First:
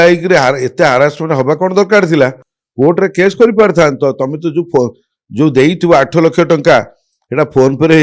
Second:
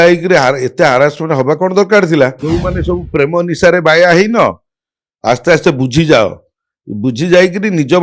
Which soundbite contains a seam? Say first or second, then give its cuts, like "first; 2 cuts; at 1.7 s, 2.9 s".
second; 1 cut; at 2.4 s